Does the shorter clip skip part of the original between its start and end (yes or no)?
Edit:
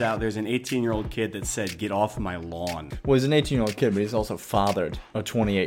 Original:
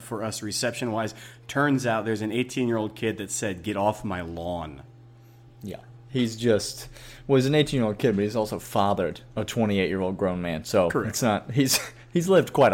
yes